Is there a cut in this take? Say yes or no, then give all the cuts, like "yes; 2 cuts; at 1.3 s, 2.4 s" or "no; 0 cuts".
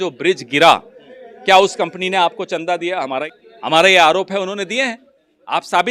yes; 1 cut; at 3.2 s